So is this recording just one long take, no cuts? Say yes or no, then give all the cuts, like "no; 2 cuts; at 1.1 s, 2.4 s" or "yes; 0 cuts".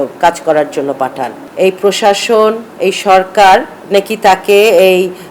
no; 1 cut; at 1.4 s